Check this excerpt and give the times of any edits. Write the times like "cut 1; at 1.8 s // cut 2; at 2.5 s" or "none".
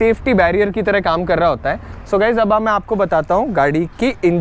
cut 1; at 2.0 s